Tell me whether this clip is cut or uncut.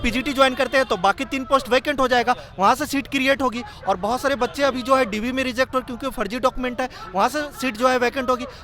uncut